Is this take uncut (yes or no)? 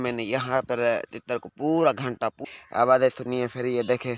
no